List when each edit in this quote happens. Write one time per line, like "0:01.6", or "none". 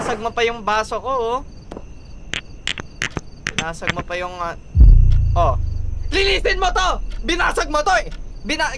0:01.7